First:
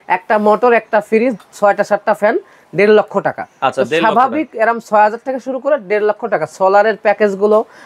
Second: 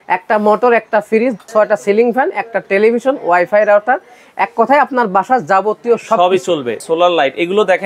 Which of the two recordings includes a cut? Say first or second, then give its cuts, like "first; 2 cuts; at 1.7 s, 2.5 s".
second; 2 cuts; at 1.5 s, 6.8 s